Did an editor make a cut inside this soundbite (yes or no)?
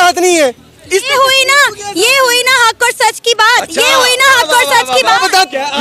no